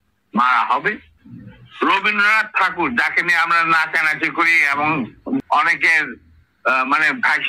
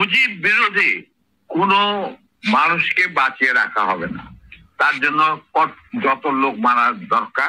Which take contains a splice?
first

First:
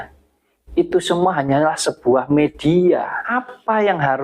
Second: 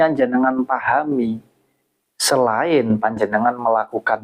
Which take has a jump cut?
first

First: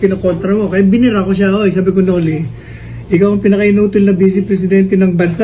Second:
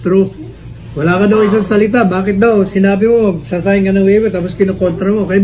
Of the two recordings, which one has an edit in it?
first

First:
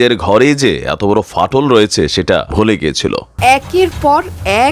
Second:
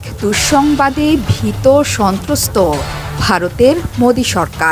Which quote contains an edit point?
first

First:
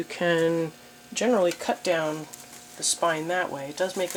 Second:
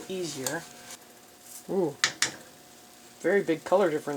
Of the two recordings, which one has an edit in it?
second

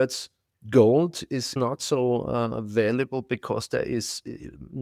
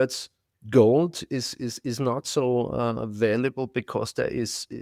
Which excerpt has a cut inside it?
first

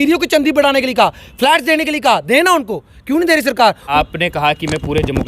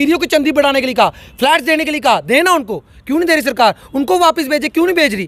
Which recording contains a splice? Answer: first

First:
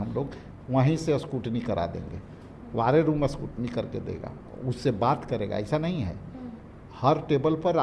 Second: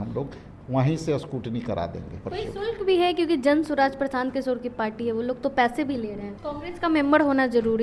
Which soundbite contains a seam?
second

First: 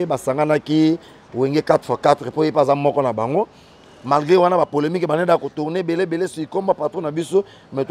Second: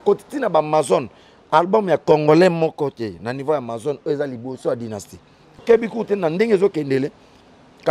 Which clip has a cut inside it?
second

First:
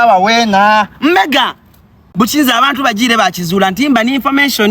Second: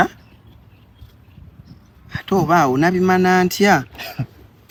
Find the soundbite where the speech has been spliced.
first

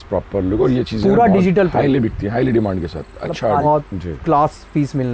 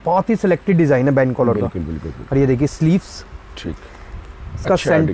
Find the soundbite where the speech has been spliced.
first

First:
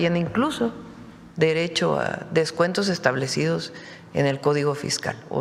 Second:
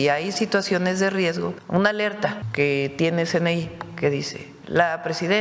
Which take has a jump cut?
second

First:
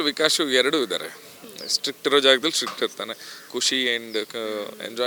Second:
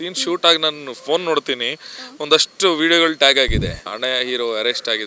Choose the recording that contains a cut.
second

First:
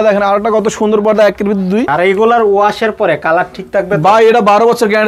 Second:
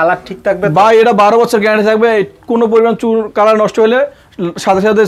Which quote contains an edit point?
first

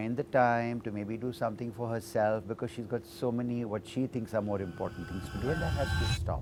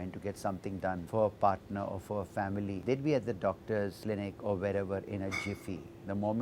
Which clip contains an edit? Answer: second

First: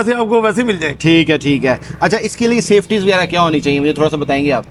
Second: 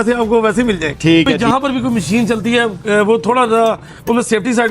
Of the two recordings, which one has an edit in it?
second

